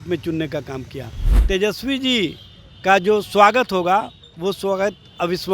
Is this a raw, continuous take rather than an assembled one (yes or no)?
no